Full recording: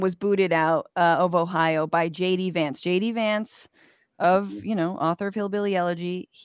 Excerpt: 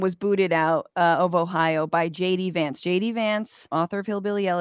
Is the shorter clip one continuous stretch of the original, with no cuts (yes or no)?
no